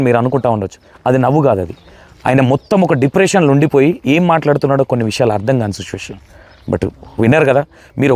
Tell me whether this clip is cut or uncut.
uncut